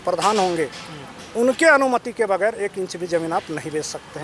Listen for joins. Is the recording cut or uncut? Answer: uncut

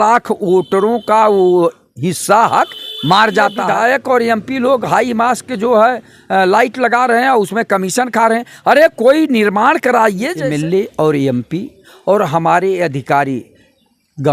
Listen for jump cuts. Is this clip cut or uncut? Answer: cut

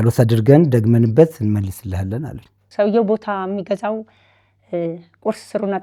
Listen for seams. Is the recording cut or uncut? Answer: cut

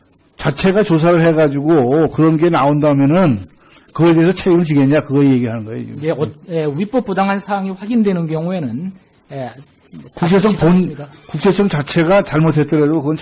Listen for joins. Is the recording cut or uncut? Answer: uncut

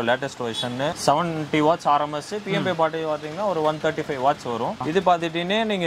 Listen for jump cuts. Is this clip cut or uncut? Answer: cut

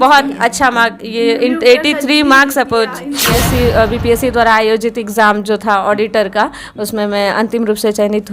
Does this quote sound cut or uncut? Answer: cut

